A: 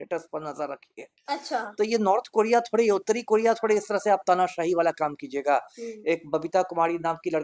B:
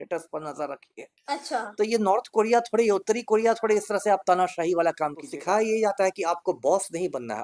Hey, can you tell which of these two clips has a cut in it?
B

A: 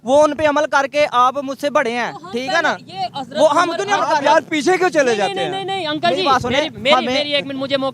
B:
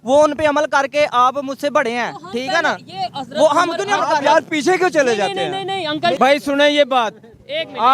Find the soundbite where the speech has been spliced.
B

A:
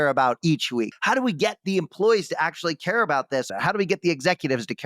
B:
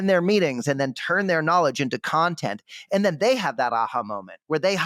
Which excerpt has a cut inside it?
A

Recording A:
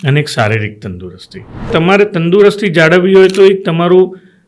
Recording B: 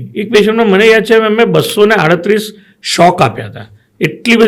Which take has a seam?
A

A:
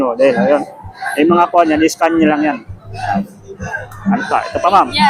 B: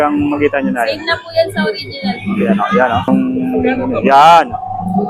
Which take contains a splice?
B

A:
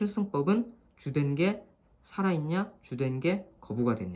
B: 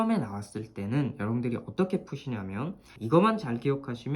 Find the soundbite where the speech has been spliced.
B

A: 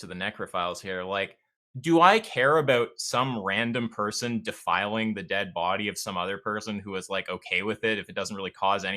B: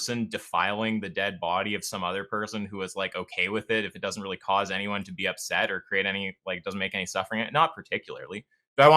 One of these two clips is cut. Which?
A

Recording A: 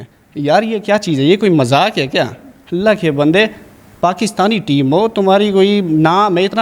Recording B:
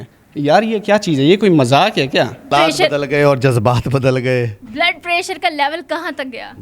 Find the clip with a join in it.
B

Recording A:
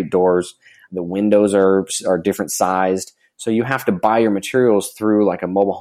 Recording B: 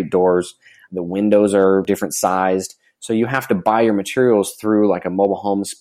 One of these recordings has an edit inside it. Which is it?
B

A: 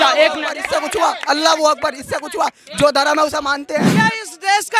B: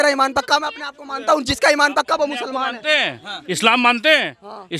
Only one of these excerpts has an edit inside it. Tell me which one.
A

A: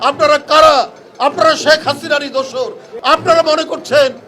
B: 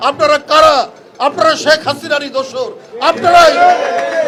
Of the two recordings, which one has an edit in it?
A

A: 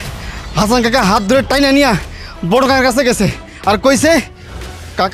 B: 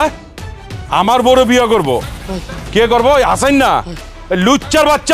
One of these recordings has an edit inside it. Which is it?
B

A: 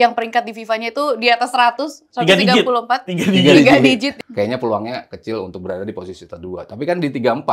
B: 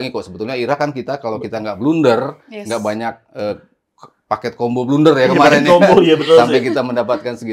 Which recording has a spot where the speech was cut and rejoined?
A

